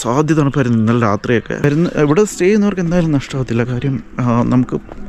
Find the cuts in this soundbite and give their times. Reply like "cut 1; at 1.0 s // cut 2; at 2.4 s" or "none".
cut 1; at 1.6 s